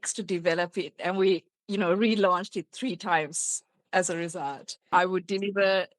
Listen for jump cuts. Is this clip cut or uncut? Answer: cut